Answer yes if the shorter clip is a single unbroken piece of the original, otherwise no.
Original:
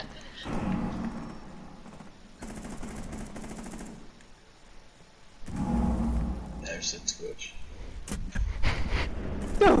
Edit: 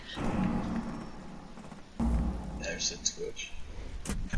no